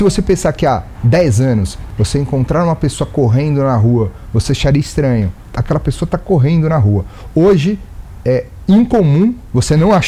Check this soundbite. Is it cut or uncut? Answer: cut